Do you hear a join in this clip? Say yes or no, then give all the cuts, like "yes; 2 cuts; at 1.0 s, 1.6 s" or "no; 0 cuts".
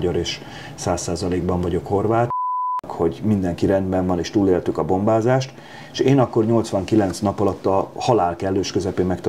yes; 1 cut; at 2.4 s